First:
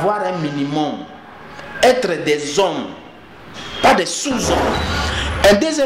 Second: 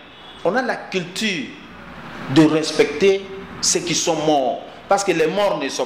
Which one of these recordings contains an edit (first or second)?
first